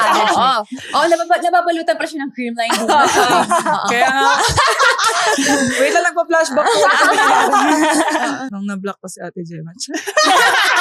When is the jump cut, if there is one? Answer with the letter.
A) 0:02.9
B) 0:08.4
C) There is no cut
B